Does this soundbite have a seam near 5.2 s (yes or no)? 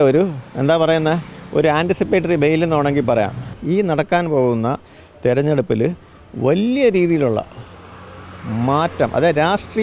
no